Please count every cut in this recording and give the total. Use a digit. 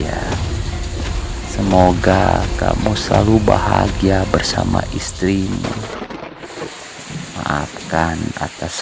2